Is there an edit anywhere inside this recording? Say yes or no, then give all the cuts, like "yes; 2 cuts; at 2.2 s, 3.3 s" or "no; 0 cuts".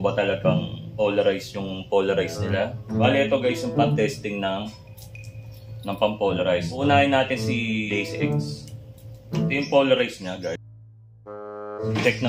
no; 0 cuts